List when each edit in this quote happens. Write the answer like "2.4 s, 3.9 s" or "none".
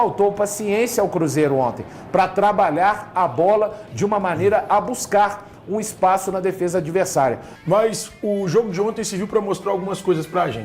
7.5 s